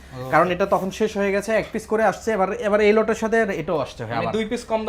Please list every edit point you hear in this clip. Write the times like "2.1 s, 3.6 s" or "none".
none